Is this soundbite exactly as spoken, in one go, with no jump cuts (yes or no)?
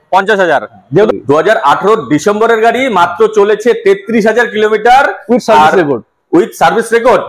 no